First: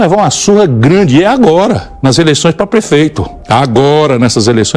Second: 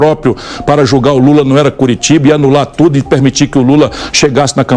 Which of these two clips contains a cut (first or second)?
first